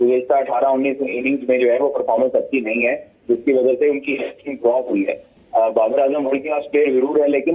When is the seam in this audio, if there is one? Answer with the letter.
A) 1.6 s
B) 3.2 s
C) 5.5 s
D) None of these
D